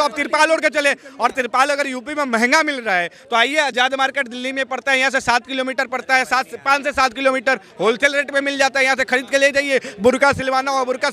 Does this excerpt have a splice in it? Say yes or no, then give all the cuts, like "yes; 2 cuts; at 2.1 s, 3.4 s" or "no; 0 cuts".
no; 0 cuts